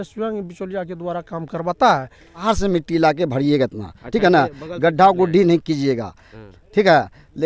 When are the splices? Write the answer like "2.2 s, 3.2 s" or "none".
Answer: 2.4 s